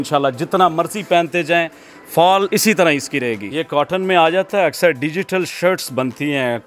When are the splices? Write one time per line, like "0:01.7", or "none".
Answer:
0:02.5
0:03.4